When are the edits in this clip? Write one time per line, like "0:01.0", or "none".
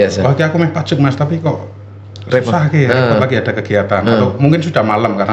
none